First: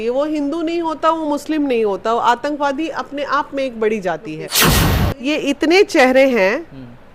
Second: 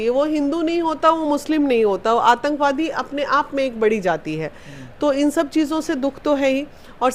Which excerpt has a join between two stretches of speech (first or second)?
first